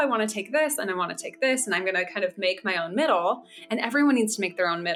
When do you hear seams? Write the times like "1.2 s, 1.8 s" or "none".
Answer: none